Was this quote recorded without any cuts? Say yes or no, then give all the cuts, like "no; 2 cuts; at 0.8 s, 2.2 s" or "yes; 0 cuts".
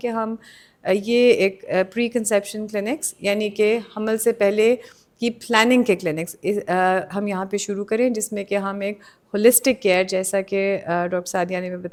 yes; 0 cuts